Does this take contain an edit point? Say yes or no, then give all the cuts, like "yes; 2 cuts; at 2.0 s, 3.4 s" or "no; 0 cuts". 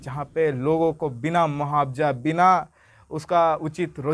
no; 0 cuts